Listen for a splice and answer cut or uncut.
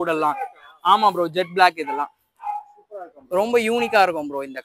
uncut